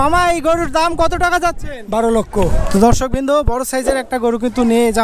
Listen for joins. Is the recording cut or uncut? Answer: cut